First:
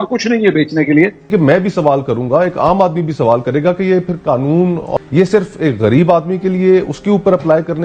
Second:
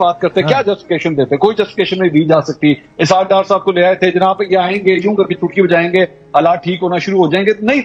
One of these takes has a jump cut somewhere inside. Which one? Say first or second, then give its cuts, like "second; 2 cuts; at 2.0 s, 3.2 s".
first; 2 cuts; at 1.2 s, 4.9 s